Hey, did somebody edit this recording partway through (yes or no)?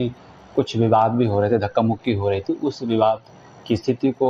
yes